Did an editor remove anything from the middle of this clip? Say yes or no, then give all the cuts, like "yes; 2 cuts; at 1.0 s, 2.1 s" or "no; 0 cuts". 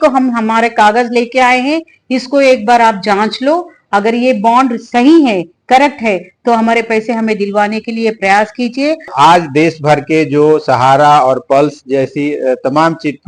yes; 1 cut; at 9.1 s